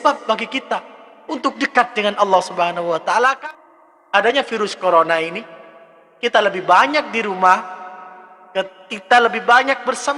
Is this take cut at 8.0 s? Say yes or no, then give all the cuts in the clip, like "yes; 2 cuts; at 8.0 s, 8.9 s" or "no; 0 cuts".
no; 1 cut; at 3.4 s